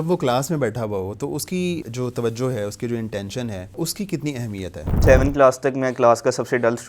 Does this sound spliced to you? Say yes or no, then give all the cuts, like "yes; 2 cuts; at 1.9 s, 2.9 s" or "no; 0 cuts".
yes; 3 cuts; at 1.8 s, 3.8 s, 5.0 s